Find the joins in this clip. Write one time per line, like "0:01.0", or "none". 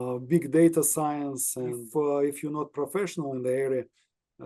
0:01.8